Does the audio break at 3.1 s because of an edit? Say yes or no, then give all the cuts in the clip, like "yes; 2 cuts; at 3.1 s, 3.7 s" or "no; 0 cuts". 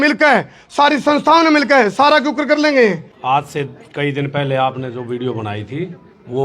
yes; 1 cut; at 3.1 s